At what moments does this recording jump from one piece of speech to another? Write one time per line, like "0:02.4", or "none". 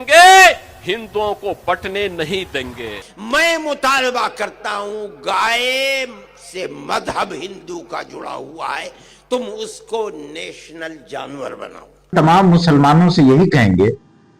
0:03.1
0:12.1